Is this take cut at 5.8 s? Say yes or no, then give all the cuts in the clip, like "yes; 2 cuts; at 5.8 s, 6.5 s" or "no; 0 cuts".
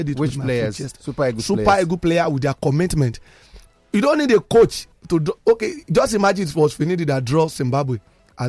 no; 0 cuts